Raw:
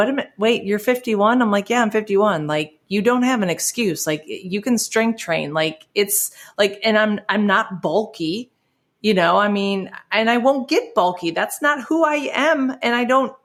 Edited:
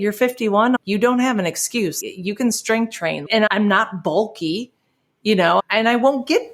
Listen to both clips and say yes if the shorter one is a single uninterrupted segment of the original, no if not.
no